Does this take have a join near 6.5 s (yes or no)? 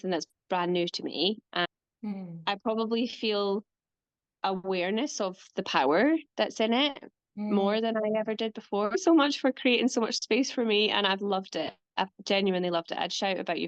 no